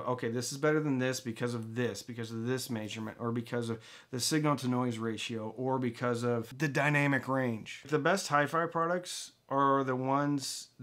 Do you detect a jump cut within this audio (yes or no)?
yes